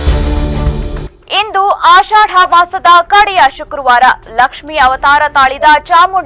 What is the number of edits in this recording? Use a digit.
1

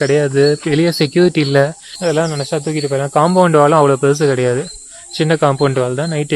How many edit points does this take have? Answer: 1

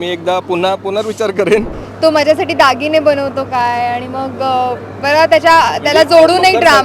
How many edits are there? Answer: 1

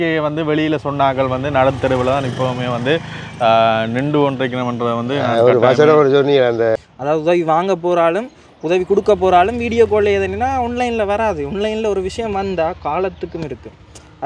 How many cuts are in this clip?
1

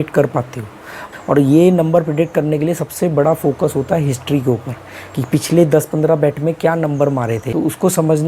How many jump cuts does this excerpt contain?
2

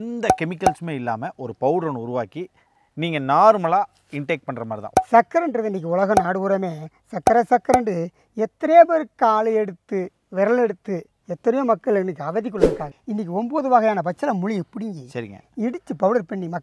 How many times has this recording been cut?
2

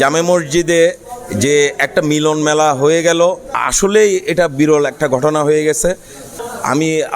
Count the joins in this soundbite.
1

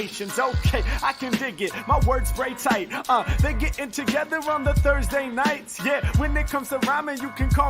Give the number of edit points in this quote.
1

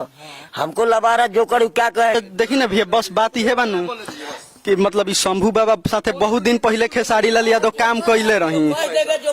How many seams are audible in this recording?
1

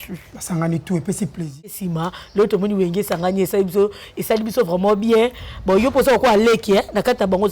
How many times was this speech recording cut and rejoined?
1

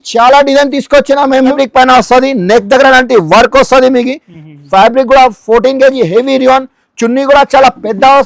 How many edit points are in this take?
1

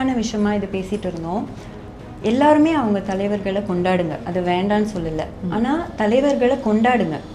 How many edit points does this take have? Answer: 0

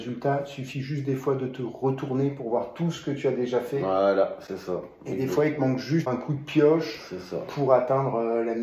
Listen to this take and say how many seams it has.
1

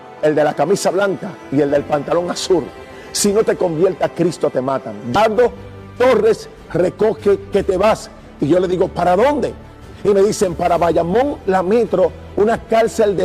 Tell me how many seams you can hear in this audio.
1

